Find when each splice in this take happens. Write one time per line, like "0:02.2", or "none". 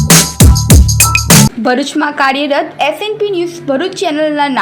0:01.5